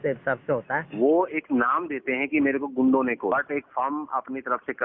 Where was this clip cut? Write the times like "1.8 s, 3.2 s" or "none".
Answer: 0.9 s, 3.3 s

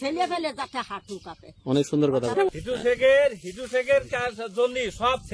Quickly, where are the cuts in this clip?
2.3 s

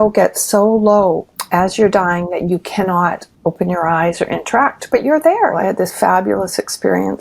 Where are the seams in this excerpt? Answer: 1.3 s, 3.3 s, 5.5 s

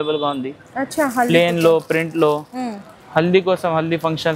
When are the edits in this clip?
none

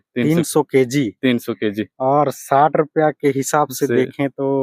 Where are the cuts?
none

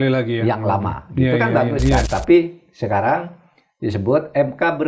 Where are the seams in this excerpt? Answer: 2.1 s

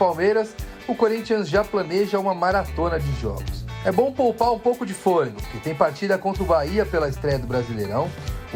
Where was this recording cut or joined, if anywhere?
none

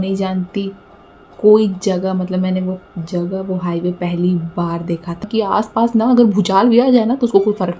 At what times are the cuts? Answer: 5.2 s

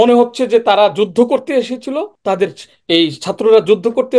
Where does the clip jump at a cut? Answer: 2.1 s

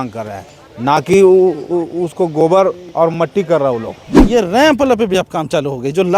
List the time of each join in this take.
4.2 s

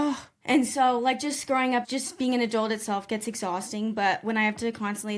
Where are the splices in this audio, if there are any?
1.8 s

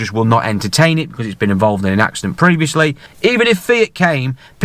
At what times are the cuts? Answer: 3.1 s

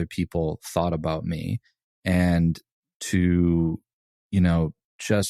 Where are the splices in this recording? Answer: none

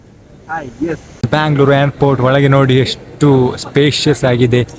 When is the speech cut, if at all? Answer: 1.1 s

